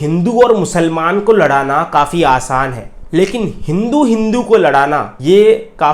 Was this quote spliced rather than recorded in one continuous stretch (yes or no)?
no